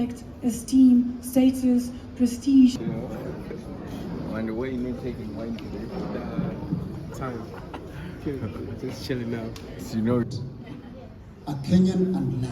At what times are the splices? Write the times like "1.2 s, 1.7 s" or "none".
2.8 s, 10.2 s